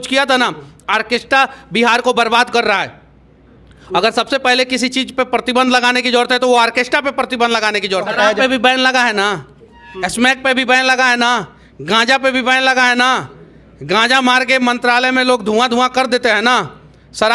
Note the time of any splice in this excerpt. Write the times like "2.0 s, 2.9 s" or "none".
8.1 s